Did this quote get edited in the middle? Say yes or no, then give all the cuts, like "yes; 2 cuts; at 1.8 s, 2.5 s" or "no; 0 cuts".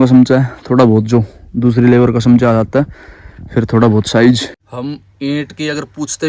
yes; 1 cut; at 4.6 s